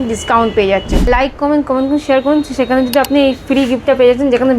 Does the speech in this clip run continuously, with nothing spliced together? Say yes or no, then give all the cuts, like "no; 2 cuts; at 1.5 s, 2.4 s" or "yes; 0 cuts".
no; 1 cut; at 1.0 s